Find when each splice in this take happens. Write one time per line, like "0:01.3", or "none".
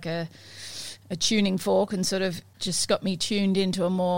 0:02.5